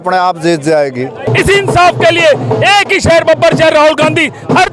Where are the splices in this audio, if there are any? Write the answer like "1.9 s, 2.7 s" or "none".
1.3 s